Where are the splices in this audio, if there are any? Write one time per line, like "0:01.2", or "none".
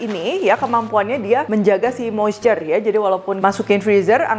0:01.5
0:03.3